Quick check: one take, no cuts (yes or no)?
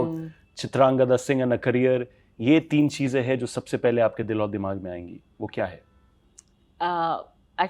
yes